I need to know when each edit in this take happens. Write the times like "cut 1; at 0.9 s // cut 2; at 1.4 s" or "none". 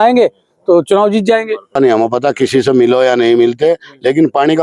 cut 1; at 1.7 s